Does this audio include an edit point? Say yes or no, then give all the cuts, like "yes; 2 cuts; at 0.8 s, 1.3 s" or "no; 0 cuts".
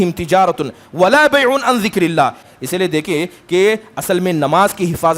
yes; 1 cut; at 2.4 s